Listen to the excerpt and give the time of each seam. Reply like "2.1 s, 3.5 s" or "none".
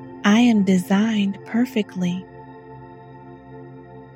2.3 s